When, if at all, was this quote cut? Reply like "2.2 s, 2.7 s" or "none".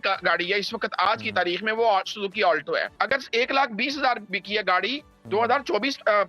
2.9 s